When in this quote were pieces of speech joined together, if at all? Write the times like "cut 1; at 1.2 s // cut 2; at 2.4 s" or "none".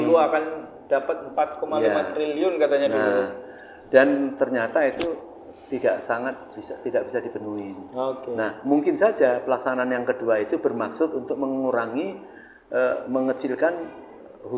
none